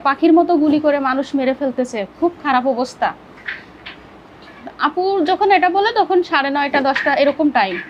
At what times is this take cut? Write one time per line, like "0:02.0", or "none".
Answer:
none

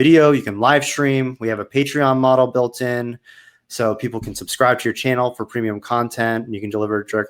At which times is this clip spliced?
none

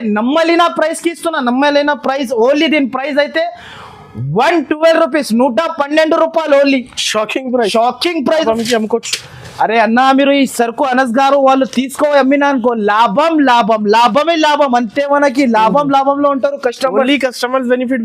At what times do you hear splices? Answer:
0:08.4

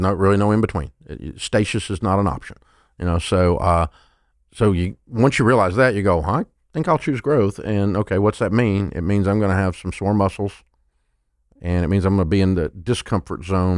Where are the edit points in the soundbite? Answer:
none

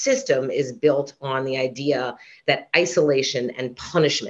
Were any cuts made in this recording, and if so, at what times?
none

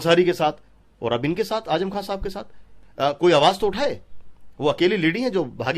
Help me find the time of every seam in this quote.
0:02.7

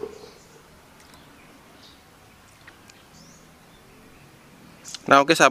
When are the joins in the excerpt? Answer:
0:03.1

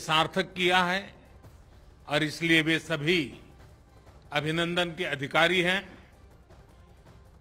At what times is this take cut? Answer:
0:06.0

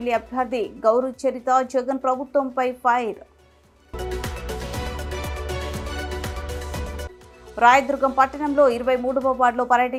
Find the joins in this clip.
none

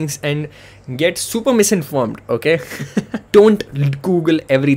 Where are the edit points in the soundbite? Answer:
0:03.2

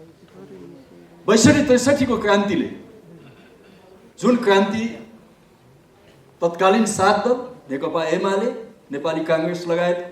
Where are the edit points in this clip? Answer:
none

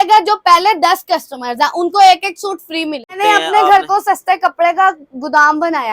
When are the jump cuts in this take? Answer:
0:03.1

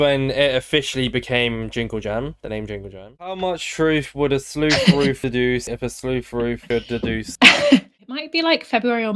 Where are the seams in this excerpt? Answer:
0:03.3
0:07.9

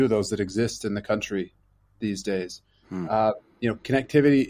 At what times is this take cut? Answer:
none

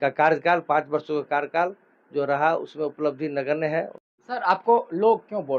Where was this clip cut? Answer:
0:04.0

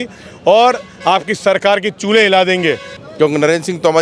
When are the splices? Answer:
0:02.9

